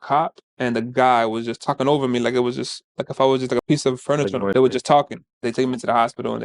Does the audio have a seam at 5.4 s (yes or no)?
yes